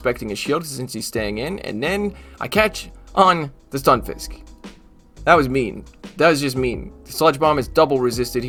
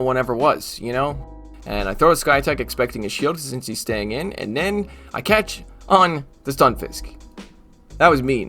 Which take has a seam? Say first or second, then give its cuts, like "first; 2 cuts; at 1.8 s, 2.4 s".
second; 1 cut; at 1.2 s